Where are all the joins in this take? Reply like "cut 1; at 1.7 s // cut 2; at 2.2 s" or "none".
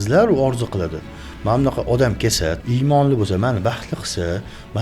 cut 1; at 2.6 s